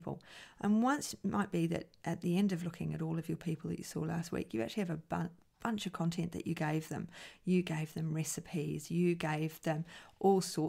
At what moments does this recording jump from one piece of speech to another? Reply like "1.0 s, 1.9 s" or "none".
none